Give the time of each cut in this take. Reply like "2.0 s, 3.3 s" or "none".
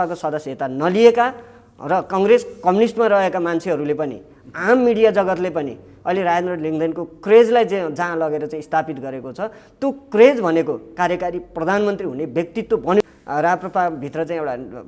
13.0 s

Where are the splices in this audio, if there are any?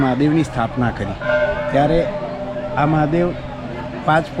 none

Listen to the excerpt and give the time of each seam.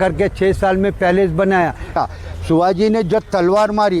1.9 s

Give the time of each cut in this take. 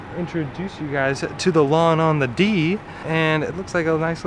none

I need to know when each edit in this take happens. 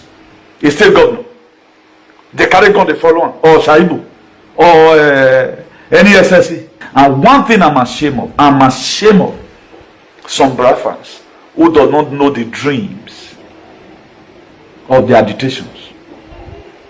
6.8 s

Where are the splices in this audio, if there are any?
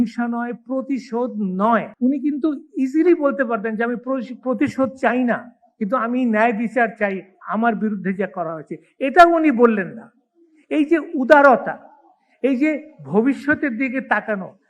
1.9 s

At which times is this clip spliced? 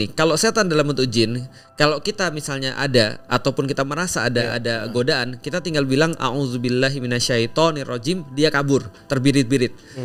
none

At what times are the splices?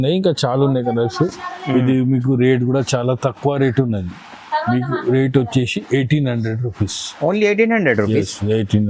none

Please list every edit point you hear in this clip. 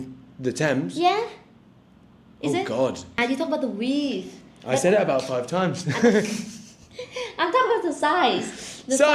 3.1 s

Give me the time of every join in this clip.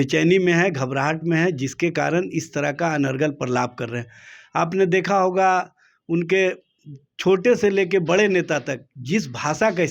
none

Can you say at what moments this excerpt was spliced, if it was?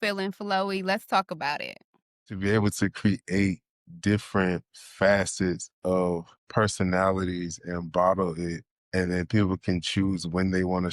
2.4 s

